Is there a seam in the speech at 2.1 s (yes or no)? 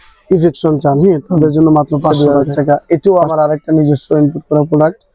yes